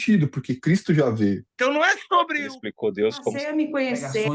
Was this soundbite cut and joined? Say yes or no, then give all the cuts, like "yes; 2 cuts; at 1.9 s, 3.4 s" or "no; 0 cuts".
yes; 1 cut; at 1.5 s